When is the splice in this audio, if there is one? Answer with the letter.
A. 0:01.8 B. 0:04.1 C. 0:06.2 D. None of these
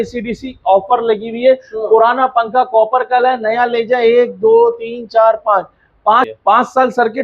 C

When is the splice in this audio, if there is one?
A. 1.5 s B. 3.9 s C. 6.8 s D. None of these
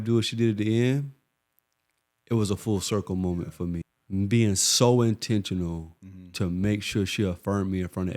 B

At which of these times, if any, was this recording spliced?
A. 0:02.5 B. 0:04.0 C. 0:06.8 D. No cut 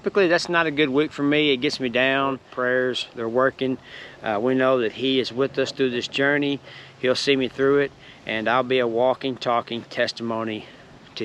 A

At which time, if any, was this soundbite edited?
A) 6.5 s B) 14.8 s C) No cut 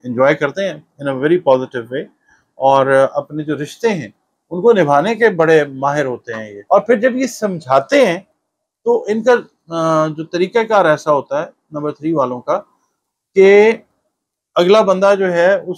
A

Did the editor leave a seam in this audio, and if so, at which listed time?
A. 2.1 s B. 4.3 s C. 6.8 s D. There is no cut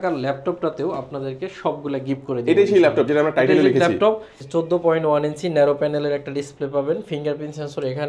B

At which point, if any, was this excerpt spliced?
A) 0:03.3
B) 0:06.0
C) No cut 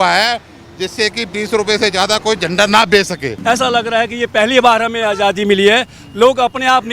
A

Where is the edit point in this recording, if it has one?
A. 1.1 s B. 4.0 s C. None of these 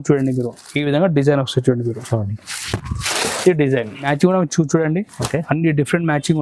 B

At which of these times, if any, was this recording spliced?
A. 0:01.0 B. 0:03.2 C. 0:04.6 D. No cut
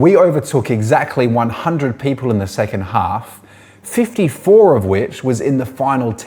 D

